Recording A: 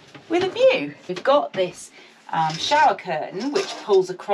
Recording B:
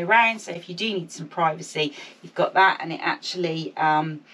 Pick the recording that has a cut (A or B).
A